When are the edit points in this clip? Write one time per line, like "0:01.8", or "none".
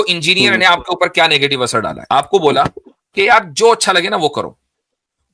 0:02.0